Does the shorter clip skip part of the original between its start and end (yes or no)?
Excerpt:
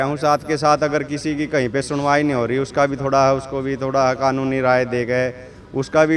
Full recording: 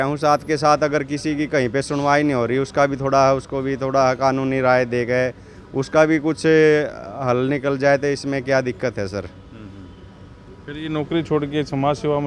no